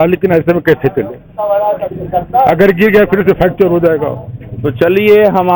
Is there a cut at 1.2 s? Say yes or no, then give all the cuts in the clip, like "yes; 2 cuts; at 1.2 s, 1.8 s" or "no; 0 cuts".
no; 0 cuts